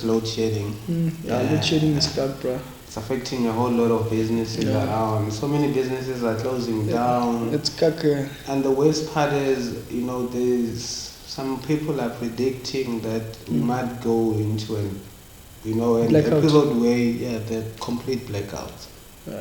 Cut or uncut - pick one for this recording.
uncut